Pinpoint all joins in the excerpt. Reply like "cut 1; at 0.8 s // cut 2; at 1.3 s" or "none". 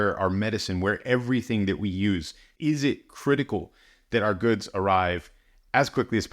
cut 1; at 2.5 s